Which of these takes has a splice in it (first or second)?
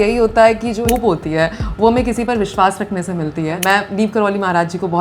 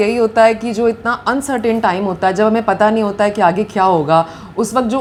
first